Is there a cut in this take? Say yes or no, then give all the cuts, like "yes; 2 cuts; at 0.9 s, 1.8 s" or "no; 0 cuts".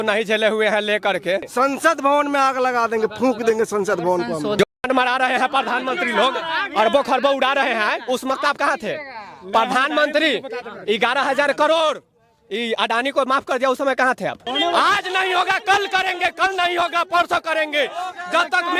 yes; 3 cuts; at 1.5 s, 4.6 s, 14.4 s